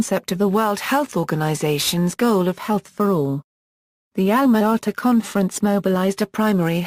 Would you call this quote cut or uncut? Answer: uncut